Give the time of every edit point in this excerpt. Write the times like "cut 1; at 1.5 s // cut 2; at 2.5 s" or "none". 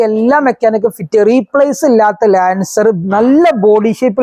none